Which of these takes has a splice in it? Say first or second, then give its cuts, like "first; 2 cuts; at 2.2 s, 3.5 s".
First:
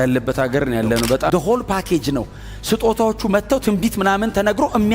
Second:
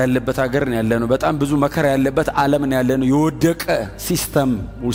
first; 1 cut; at 1.3 s